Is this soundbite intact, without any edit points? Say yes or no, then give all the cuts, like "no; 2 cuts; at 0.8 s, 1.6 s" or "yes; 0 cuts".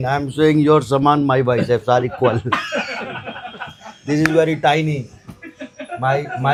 yes; 0 cuts